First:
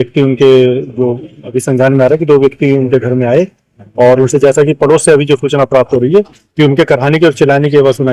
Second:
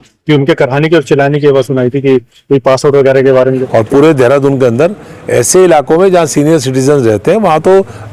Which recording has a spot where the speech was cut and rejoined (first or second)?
second